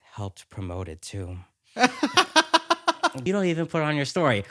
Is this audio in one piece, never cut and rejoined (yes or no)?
no